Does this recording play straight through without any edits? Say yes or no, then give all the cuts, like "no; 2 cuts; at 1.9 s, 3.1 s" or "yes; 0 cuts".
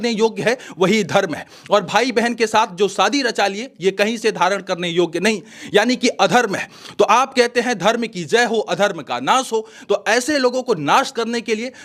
yes; 0 cuts